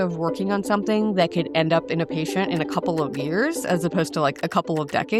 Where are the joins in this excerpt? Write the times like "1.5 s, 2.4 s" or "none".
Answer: none